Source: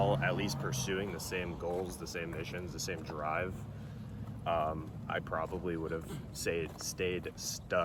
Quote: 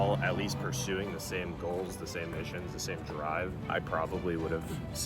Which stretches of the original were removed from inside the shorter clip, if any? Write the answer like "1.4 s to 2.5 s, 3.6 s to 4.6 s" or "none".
3.6 s to 5.0 s